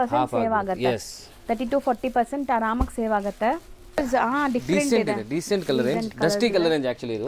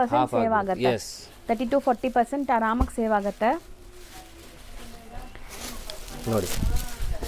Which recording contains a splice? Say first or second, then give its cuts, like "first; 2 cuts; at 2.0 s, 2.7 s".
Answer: first; 1 cut; at 4.0 s